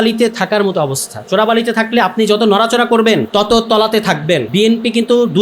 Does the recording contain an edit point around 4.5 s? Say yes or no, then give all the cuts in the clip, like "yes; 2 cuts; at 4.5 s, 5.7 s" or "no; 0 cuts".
yes; 2 cuts; at 3.3 s, 4.5 s